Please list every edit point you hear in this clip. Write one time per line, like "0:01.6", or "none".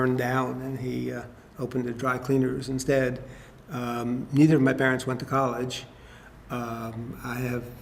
0:06.7